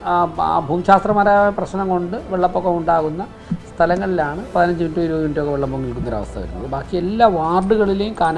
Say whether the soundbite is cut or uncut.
uncut